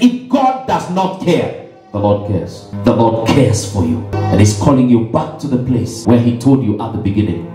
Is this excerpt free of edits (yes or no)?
no